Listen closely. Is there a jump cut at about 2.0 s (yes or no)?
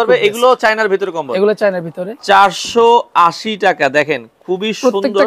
yes